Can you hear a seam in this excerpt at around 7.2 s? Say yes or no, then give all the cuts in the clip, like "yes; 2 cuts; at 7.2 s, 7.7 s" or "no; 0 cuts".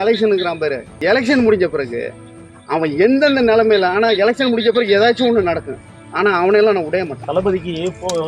yes; 2 cuts; at 1.0 s, 7.2 s